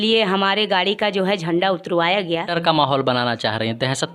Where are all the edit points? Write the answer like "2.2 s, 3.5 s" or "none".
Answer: 2.5 s